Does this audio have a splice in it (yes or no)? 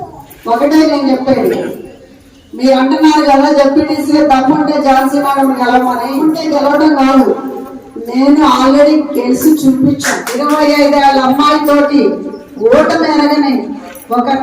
yes